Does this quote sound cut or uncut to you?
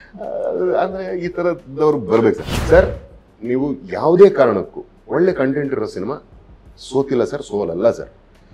cut